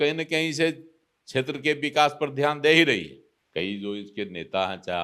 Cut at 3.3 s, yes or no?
yes